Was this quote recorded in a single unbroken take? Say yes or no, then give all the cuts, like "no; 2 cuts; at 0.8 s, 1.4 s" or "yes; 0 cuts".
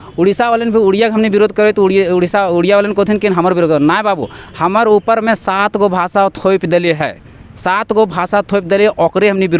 yes; 0 cuts